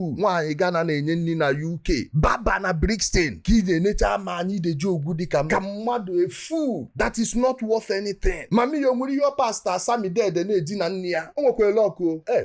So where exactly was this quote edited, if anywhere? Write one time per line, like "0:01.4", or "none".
0:03.4
0:11.3